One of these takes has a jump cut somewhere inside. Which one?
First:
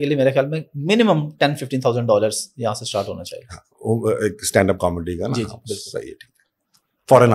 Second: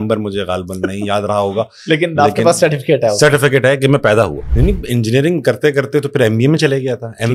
second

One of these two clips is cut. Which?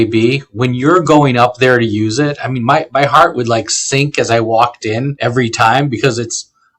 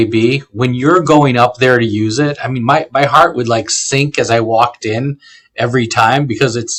first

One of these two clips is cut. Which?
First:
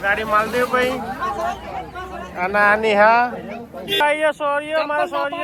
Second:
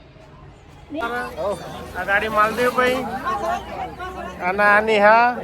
second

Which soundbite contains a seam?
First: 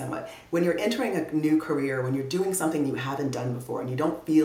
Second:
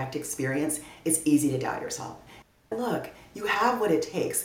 second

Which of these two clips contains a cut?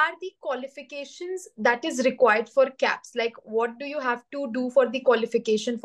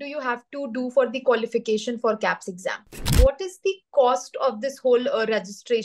second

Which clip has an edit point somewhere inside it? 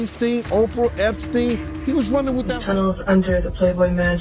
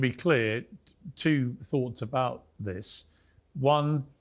first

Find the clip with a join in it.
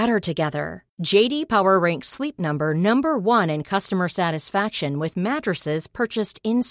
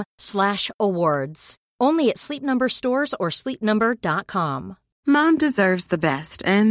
second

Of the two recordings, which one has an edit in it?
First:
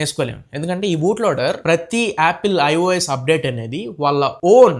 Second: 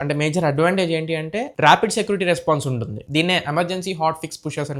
first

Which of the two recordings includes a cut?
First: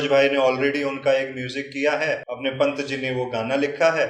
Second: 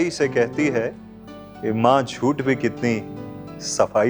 first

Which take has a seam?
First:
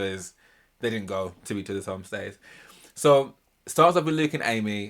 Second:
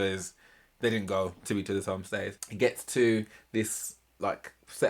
second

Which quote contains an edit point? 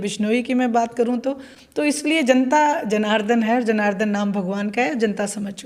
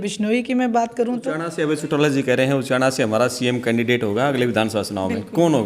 second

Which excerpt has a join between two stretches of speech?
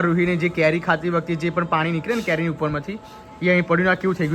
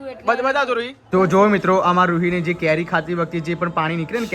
second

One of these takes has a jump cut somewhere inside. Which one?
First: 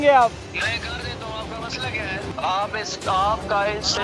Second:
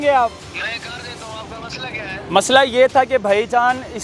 first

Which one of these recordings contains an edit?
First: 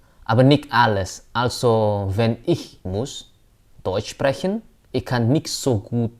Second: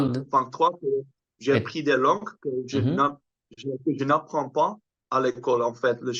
first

